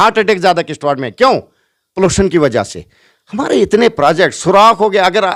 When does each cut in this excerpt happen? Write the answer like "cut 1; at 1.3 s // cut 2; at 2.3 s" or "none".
none